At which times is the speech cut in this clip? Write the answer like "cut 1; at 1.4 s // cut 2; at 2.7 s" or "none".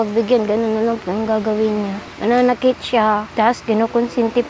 cut 1; at 2.1 s // cut 2; at 3.3 s